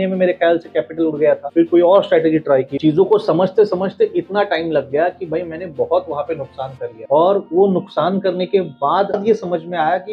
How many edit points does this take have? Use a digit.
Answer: 4